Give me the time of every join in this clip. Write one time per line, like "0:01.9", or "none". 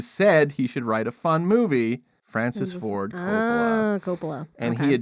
0:02.2